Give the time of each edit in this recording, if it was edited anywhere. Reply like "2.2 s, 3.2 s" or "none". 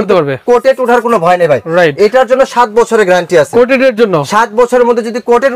none